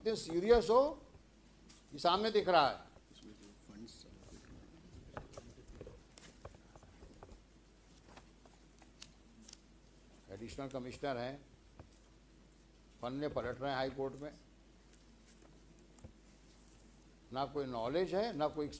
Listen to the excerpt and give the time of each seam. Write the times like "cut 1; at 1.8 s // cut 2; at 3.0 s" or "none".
none

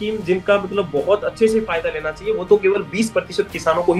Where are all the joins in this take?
none

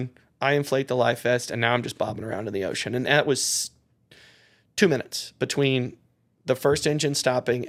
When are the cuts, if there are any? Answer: none

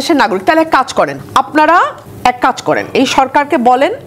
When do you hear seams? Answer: cut 1; at 1.2 s // cut 2; at 2.0 s

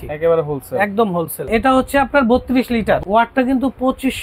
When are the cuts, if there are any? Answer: cut 1; at 1.4 s // cut 2; at 3.0 s

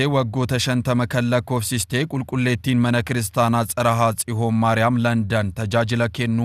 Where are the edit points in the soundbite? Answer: none

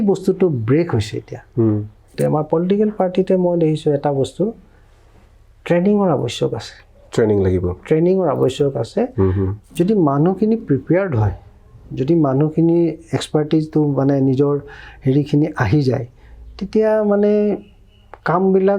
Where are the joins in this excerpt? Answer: cut 1; at 2.2 s // cut 2; at 9.6 s

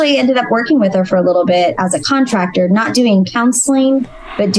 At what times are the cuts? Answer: none

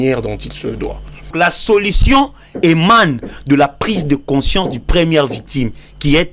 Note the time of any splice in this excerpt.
cut 1; at 1.3 s

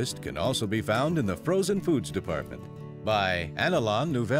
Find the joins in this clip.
none

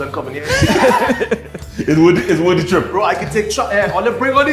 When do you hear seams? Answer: none

